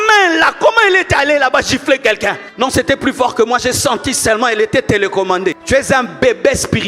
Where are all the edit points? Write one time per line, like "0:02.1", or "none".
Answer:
0:02.4
0:05.6

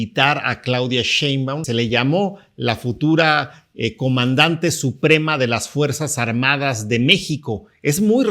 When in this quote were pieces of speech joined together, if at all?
0:01.6

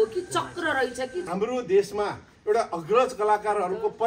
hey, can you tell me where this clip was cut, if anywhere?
0:01.3

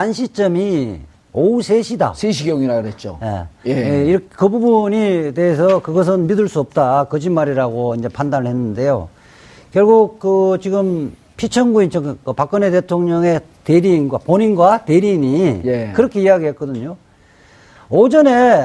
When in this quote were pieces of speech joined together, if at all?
0:15.6

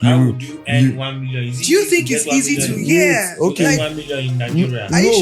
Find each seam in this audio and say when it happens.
none

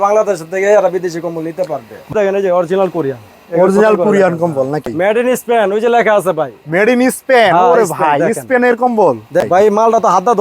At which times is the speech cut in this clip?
0:02.1
0:04.9
0:09.4

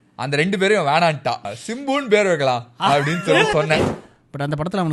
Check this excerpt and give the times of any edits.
0:01.4
0:03.9

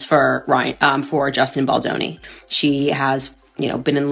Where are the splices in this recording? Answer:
0:02.2

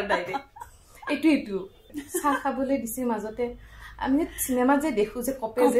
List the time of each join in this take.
0:01.9

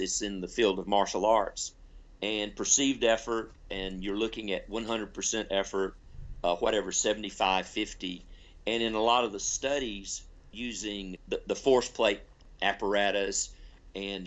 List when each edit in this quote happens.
0:11.1
0:12.4

